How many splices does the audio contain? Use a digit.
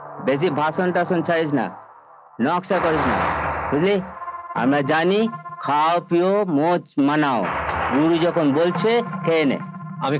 0